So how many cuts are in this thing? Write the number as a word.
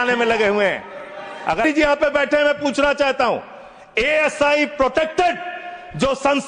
one